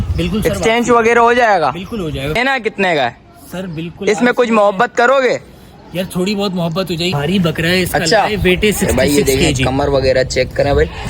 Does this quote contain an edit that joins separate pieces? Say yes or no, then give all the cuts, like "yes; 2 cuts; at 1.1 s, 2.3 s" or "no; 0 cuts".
yes; 2 cuts; at 2.4 s, 7.1 s